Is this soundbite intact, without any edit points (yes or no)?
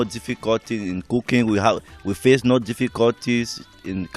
yes